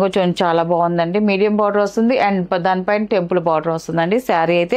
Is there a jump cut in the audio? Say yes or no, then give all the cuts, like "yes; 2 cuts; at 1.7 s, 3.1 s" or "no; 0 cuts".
no; 0 cuts